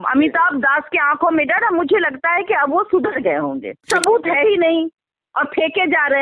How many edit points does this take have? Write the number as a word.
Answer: one